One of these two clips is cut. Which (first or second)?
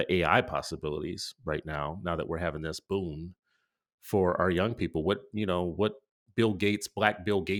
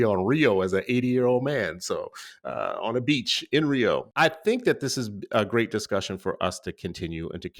second